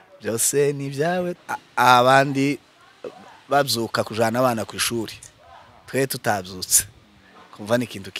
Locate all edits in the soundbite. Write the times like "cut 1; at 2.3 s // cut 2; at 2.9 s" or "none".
cut 1; at 1.3 s